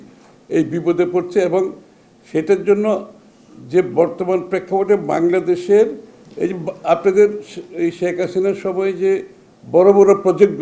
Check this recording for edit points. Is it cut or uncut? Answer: uncut